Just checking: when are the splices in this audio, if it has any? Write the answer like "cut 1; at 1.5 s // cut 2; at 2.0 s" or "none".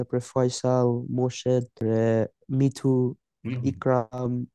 cut 1; at 1.8 s

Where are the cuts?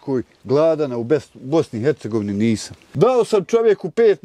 cut 1; at 2.8 s

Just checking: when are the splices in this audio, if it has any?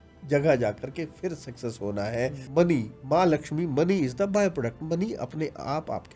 cut 1; at 2.4 s

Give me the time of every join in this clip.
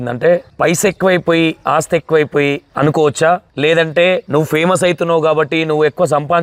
none

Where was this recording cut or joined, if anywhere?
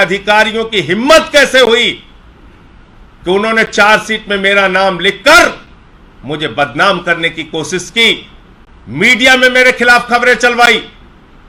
none

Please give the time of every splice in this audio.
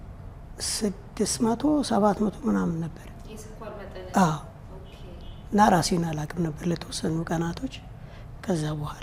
none

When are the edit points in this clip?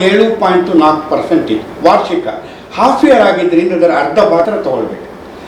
cut 1; at 4.5 s

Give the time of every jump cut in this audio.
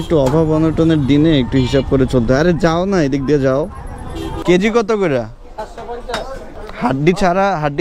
cut 1; at 4.3 s // cut 2; at 6.5 s

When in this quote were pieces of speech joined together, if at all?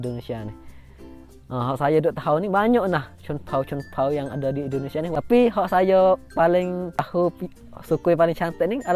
cut 1; at 5.1 s // cut 2; at 7.0 s

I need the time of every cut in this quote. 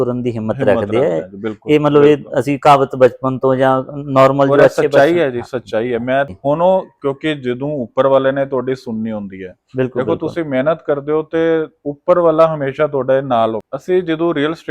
cut 1; at 6.3 s // cut 2; at 13.6 s

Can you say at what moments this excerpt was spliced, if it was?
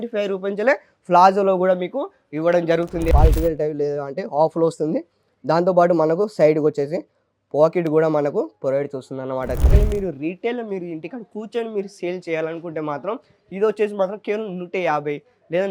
cut 1; at 3.1 s // cut 2; at 9.6 s

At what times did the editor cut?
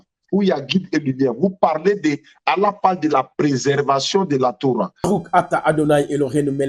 cut 1; at 4.9 s

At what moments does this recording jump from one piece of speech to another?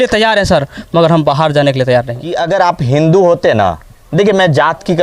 cut 1; at 2.4 s

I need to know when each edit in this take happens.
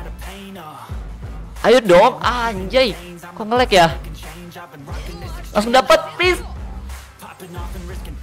cut 1; at 1.6 s // cut 2; at 4.0 s // cut 3; at 5.5 s

